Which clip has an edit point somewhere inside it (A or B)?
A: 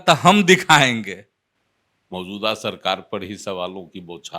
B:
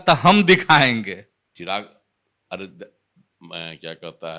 A